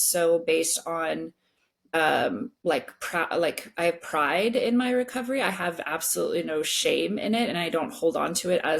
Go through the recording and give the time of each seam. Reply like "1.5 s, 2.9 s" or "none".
1.9 s, 2.5 s

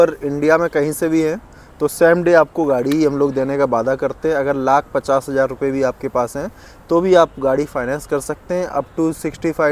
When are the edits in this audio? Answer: none

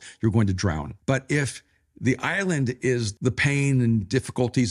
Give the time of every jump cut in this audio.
0.9 s, 3.1 s

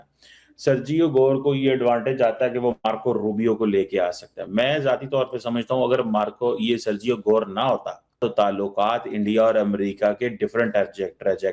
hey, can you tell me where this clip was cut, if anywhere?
8.2 s

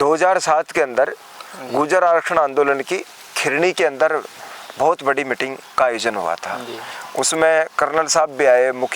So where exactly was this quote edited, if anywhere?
none

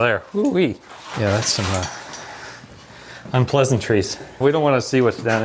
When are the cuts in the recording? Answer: 0.8 s, 4.4 s

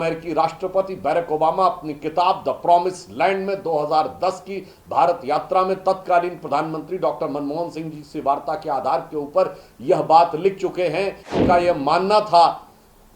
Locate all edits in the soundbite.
11.3 s

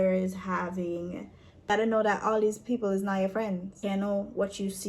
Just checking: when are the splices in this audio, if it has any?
1.7 s, 3.8 s

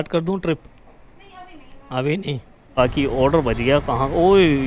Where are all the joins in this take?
2.6 s

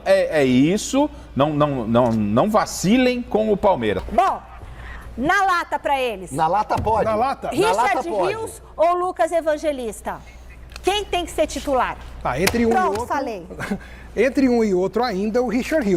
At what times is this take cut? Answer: 4.0 s

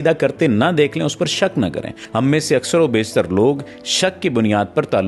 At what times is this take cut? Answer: 1.9 s

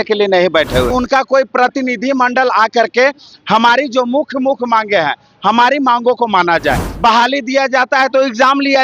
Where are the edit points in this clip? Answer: 0.9 s, 6.9 s

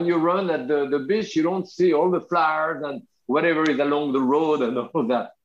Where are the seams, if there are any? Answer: none

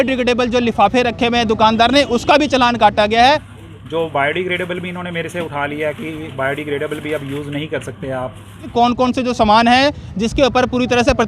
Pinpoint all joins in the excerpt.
3.5 s, 8.7 s

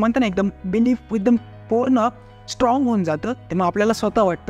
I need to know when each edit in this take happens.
3.5 s

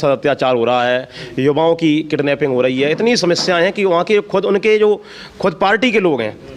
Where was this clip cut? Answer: none

